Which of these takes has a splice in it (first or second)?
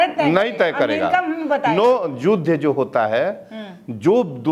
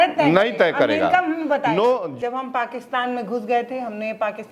second